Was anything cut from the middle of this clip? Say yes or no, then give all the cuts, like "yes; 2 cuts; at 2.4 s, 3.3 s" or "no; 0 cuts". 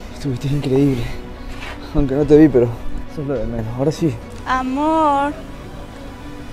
no; 0 cuts